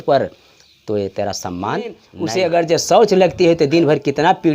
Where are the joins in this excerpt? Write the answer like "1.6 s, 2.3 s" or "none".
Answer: 2.1 s